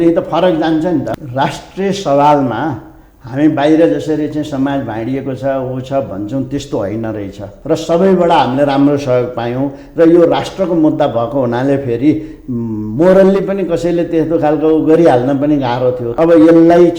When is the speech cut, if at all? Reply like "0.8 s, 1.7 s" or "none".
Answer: 1.1 s, 7.5 s, 16.0 s